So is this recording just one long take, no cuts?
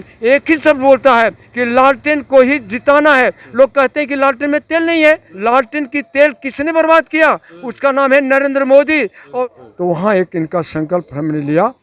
no; 2 cuts; at 5.3 s, 9.4 s

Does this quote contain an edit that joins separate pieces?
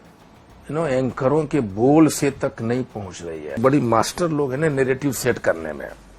yes; 1 cut; at 3.6 s

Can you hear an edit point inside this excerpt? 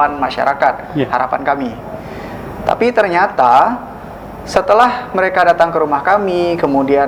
no; 0 cuts

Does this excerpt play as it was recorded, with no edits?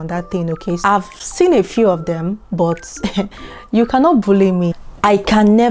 no; 2 cuts; at 0.8 s, 4.8 s

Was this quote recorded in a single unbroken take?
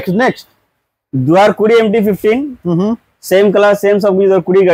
yes; 0 cuts

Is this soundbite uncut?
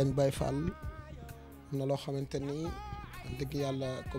yes; 0 cuts

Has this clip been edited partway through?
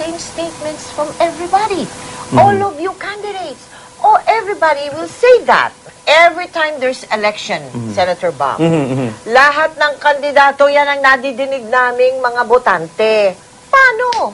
yes; 2 cuts; at 5.9 s, 13.4 s

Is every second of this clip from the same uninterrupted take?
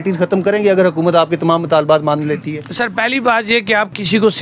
yes; 0 cuts

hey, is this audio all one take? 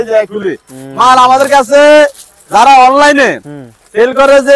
yes; 0 cuts

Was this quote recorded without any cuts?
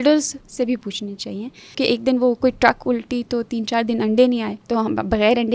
no; 2 cuts; at 1.8 s, 4.6 s

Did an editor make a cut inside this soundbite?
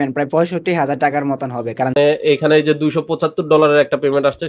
yes; 1 cut; at 1.9 s

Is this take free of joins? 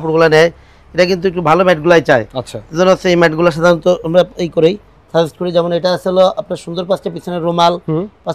yes; 0 cuts

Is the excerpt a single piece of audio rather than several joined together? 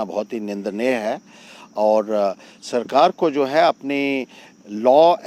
yes; 0 cuts

